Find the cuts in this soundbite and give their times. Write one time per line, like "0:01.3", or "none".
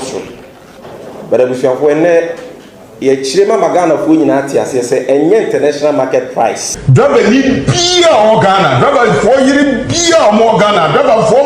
0:06.7